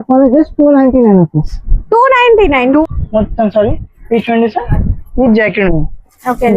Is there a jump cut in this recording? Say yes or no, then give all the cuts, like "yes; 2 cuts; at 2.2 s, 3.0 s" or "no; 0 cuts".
yes; 1 cut; at 2.8 s